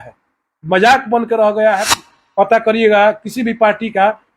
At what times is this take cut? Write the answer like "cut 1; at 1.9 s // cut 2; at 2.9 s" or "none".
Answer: cut 1; at 2.0 s